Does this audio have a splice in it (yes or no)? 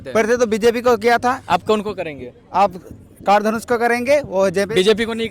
no